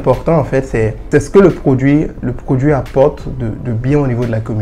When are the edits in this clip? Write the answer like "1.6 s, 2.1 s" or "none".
1.0 s